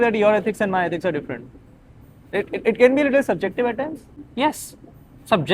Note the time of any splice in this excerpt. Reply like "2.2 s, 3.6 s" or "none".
2.3 s, 4.1 s